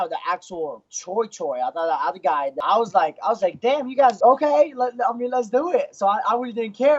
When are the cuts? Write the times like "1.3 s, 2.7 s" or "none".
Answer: 2.5 s, 4.2 s